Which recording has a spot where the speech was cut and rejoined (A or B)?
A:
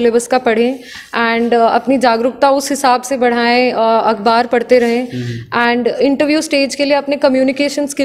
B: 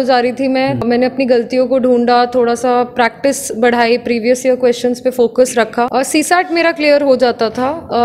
B